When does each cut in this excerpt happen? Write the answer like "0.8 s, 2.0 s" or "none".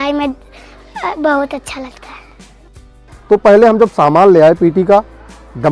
none